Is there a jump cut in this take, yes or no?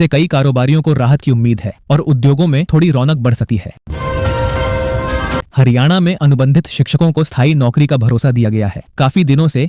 yes